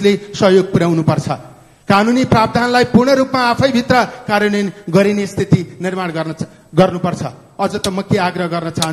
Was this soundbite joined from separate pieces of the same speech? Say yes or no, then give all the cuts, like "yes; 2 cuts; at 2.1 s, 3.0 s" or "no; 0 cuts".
no; 0 cuts